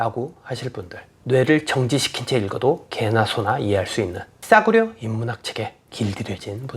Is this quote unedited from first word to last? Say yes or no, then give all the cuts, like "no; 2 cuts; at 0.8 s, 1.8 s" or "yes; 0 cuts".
no; 3 cuts; at 1.1 s, 4.4 s, 5.8 s